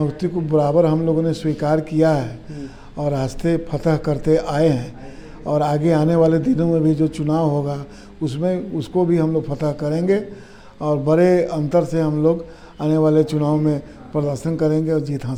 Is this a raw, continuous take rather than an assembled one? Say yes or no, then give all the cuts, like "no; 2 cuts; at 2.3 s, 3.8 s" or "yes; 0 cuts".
yes; 0 cuts